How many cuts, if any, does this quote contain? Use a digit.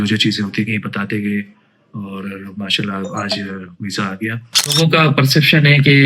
1